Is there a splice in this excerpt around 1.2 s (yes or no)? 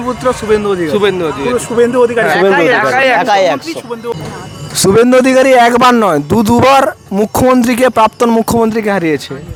no